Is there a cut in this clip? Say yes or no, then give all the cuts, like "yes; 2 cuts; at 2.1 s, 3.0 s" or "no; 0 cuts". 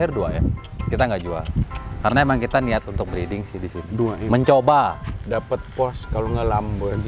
no; 0 cuts